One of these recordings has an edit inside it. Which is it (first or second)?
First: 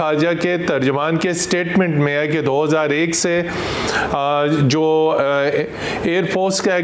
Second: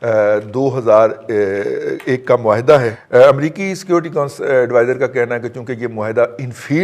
second